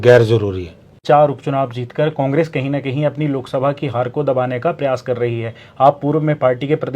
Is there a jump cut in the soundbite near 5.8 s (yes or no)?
no